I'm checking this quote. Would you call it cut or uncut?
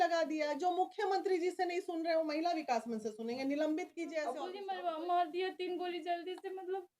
cut